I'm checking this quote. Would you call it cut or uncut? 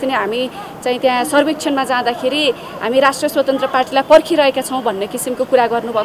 uncut